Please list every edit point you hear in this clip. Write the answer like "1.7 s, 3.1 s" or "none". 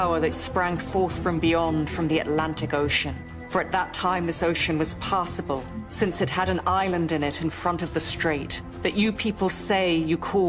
none